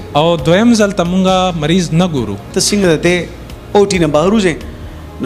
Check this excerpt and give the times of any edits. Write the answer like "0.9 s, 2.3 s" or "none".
2.4 s